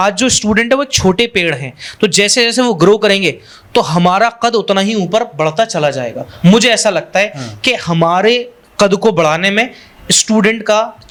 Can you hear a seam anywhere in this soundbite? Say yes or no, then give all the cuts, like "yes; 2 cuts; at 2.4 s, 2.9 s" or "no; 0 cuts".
no; 0 cuts